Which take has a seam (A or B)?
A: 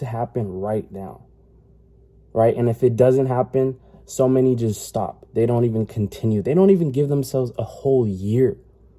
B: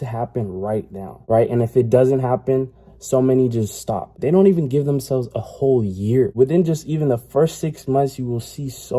B